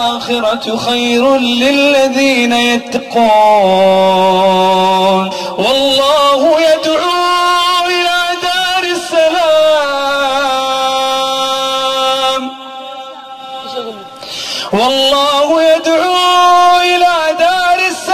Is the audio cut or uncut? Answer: cut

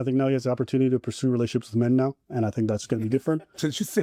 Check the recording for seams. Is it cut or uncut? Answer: uncut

